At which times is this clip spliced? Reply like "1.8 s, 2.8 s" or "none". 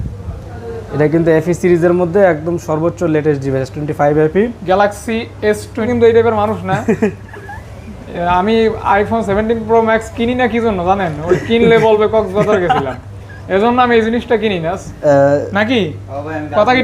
5.9 s, 15.0 s